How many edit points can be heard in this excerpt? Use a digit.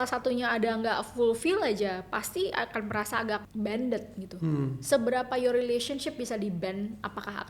1